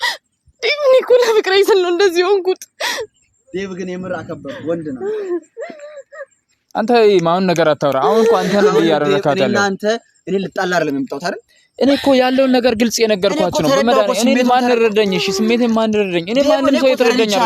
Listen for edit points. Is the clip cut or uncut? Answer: uncut